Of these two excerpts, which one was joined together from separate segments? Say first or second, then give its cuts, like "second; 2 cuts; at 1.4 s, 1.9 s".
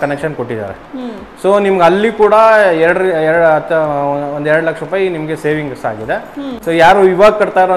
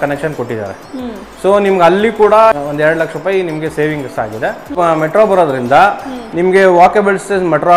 second; 2 cuts; at 2.5 s, 4.7 s